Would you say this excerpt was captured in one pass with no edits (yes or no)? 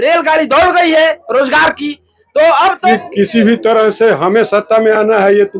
no